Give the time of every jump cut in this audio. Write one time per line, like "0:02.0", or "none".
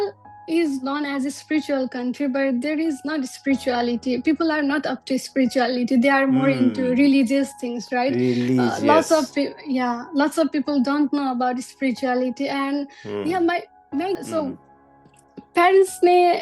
0:14.1